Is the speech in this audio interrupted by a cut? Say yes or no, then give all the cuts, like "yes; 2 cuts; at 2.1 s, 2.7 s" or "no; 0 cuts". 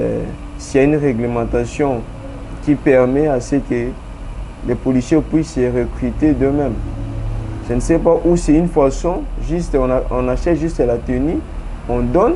no; 0 cuts